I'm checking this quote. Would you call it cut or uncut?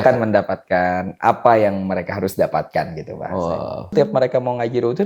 cut